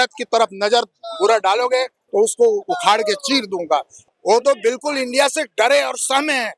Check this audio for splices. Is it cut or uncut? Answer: cut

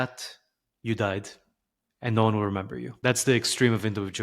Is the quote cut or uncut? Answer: cut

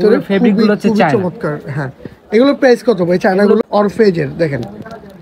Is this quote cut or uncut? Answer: cut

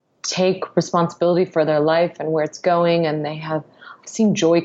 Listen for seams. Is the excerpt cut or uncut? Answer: uncut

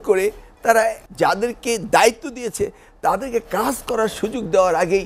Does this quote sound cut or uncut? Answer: cut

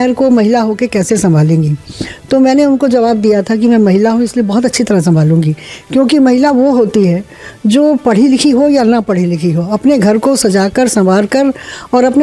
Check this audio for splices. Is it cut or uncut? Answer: uncut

